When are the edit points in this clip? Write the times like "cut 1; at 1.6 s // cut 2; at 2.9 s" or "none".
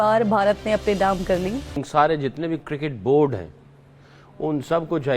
cut 1; at 1.8 s